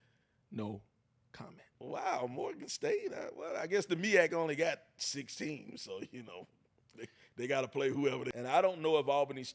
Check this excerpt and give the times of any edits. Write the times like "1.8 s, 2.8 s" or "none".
8.3 s